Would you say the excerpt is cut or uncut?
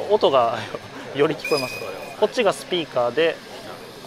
cut